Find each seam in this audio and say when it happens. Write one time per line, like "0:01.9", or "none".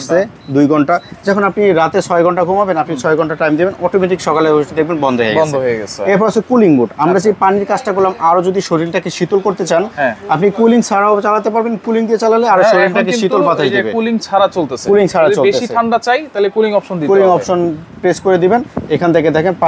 none